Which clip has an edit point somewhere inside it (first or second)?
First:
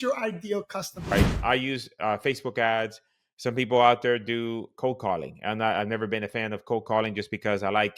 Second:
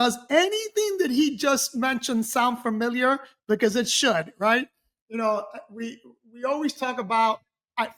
first